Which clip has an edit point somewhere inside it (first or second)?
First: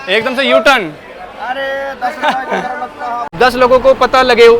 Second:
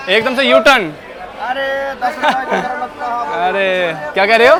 first